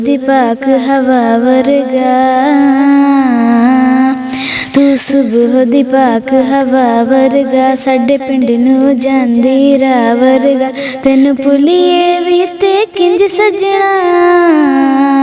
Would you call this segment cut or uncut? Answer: uncut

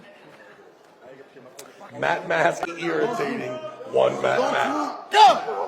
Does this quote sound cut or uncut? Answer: cut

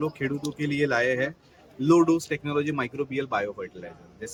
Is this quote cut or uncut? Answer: uncut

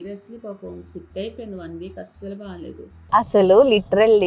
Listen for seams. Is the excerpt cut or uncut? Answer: cut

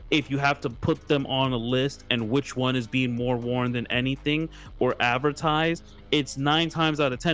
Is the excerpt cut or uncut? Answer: uncut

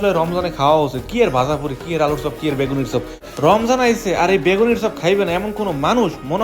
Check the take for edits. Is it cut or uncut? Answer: cut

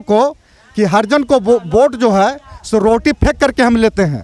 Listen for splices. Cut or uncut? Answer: uncut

